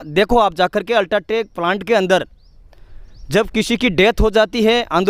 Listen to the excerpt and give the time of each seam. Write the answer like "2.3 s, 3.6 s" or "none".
none